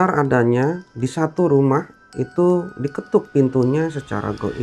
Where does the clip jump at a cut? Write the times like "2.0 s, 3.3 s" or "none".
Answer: none